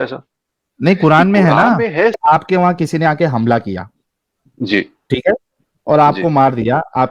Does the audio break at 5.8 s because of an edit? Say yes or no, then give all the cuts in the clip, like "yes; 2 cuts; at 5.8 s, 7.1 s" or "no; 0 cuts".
no; 1 cut; at 2.2 s